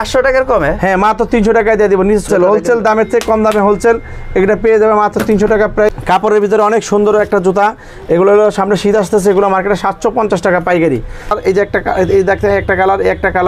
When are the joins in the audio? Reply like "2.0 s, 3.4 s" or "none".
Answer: 2.3 s, 5.9 s, 11.3 s